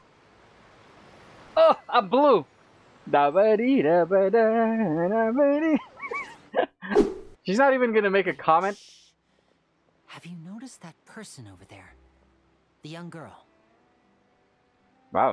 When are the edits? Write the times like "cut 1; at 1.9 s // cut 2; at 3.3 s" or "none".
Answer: cut 1; at 7.0 s